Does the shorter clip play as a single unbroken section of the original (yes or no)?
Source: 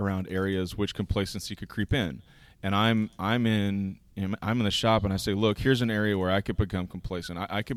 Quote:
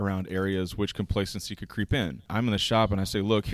no